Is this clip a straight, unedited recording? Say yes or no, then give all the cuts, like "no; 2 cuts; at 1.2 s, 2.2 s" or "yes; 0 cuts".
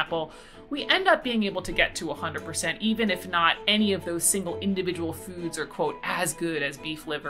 yes; 0 cuts